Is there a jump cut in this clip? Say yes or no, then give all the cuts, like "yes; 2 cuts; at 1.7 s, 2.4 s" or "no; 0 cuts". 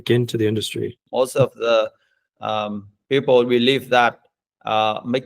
yes; 1 cut; at 1.0 s